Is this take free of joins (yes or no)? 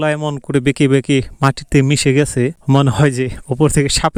yes